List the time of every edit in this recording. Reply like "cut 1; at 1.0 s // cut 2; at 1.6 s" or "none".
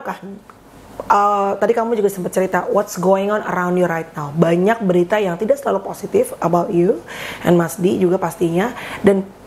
none